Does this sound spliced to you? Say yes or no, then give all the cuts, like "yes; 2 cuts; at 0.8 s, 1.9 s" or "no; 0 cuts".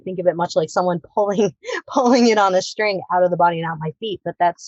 no; 0 cuts